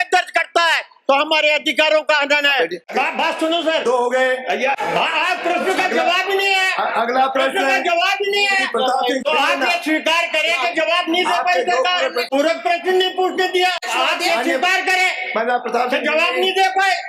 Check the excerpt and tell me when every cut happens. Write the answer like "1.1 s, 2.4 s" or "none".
2.9 s, 4.8 s, 9.2 s, 12.2 s, 13.9 s